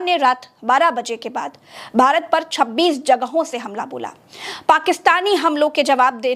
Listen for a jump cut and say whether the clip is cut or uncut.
uncut